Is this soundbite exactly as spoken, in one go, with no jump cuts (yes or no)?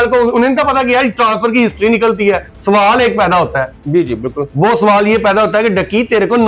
no